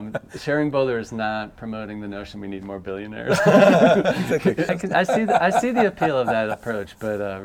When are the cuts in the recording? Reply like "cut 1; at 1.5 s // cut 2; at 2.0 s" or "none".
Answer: cut 1; at 4.7 s